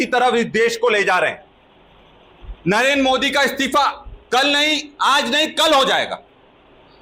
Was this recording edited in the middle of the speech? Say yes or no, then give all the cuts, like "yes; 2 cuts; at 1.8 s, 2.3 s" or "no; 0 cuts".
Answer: no; 0 cuts